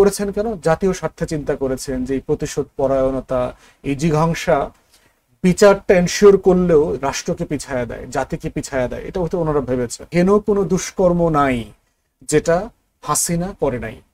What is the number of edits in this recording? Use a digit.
1